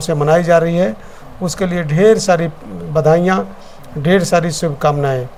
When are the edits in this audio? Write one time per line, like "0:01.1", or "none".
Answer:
none